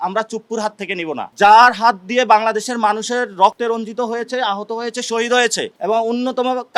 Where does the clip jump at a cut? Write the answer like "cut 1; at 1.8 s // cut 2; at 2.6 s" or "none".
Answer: cut 1; at 1.3 s

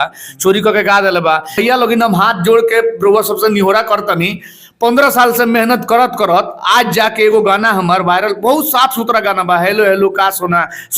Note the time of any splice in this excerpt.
cut 1; at 1.6 s

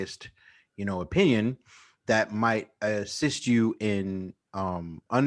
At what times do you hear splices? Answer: none

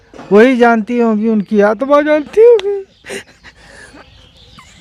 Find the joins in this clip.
none

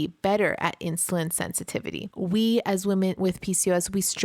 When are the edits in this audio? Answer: cut 1; at 2.0 s // cut 2; at 3.2 s

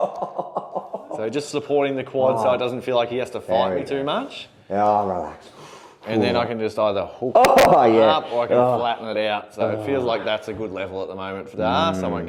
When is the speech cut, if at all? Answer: none

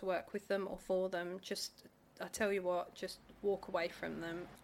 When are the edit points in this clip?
none

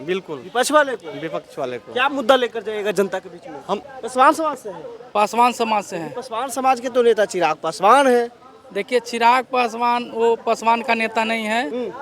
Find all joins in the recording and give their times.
cut 1; at 4.0 s

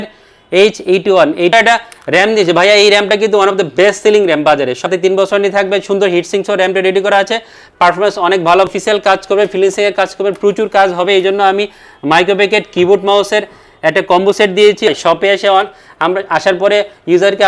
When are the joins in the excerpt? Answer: cut 1; at 1.5 s // cut 2; at 4.9 s // cut 3; at 8.7 s // cut 4; at 14.9 s

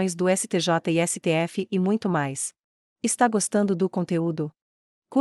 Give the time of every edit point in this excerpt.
cut 1; at 2.6 s

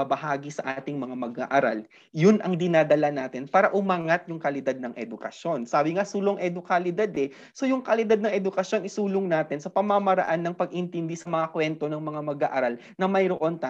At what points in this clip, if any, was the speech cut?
none

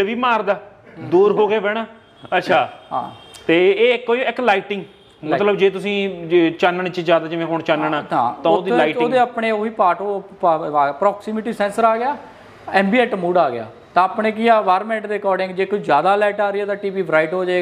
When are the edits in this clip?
none

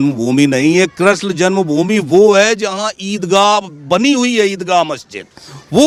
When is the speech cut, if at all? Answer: none

